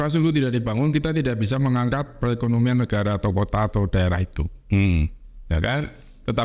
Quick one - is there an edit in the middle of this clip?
no; 0 cuts

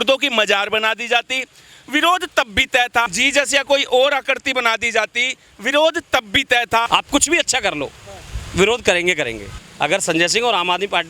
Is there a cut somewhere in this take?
yes; 3 cuts; at 3.1 s, 6.9 s, 9.6 s

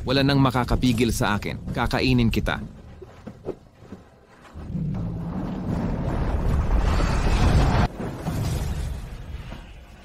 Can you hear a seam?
yes; 1 cut; at 7.9 s

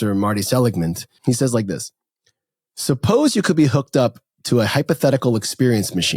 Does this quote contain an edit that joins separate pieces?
yes; 1 cut; at 1.1 s

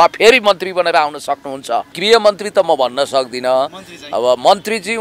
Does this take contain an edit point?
yes; 1 cut; at 2.0 s

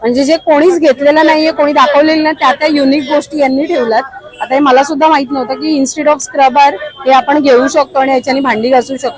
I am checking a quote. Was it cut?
no; 0 cuts

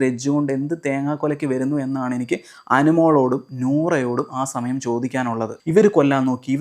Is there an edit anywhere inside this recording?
yes; 1 cut; at 5.5 s

